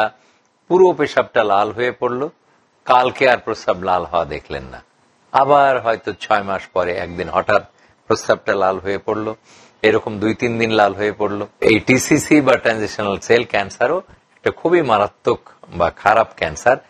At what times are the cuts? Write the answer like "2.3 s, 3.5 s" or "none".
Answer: 11.5 s, 13.2 s

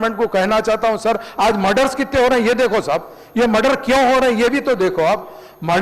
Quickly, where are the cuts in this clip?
none

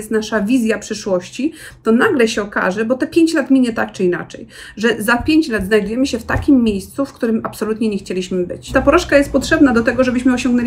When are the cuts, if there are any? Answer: 8.7 s

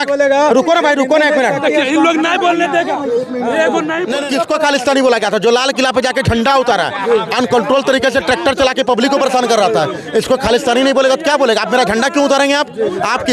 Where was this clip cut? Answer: none

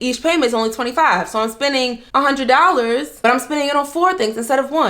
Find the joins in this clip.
2.0 s

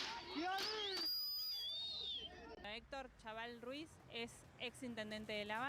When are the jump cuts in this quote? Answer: 2.6 s

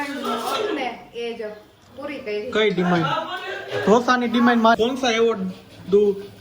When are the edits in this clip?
4.8 s

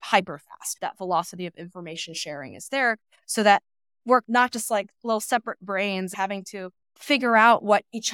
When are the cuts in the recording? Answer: 4.2 s, 6.1 s

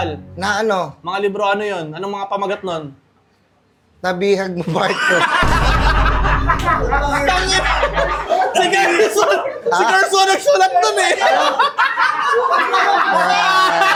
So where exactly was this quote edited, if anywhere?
none

